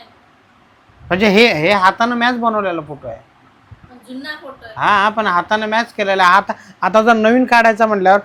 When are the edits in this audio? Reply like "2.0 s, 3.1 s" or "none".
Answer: none